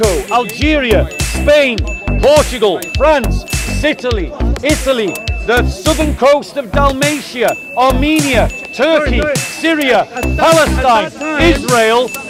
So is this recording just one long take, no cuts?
yes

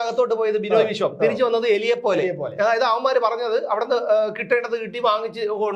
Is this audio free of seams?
yes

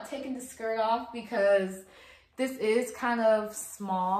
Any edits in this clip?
no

